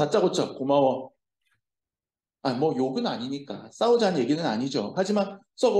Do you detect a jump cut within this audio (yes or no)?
no